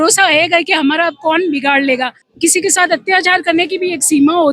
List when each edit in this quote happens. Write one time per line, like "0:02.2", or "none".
0:02.2